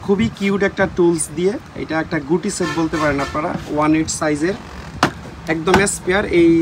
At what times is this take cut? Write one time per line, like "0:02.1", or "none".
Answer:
none

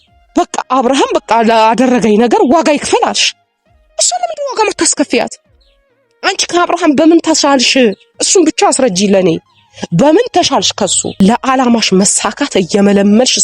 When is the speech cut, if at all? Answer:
0:11.1

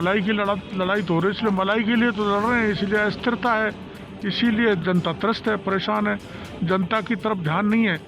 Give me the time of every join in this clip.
none

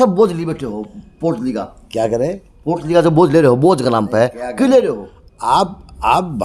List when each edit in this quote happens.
none

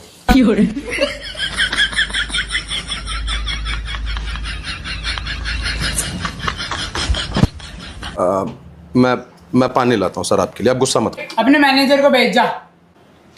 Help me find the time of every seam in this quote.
0:11.2

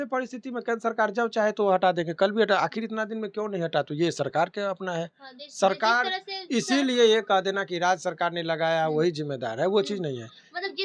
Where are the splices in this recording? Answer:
none

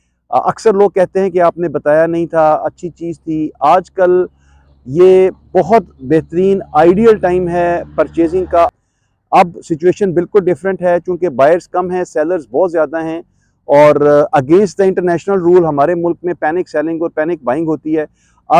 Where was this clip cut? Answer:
0:08.7

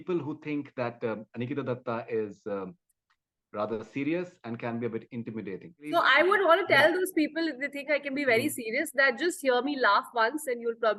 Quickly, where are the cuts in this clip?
none

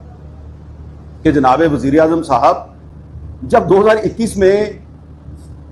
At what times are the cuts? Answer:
none

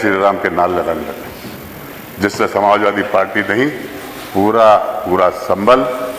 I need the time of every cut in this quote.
none

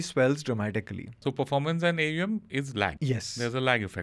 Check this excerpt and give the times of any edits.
0:01.2
0:03.0

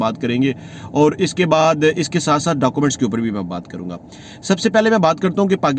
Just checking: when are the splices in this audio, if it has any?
none

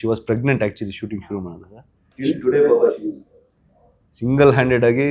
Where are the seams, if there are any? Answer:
none

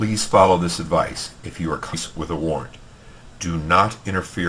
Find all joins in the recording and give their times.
none

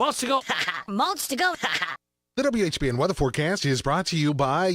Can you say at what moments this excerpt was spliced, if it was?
0:02.1

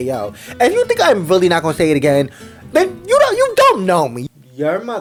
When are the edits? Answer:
none

